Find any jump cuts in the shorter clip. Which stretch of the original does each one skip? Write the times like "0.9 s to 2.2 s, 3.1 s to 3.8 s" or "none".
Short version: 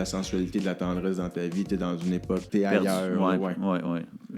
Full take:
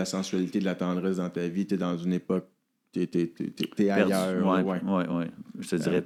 2.5 s to 3.7 s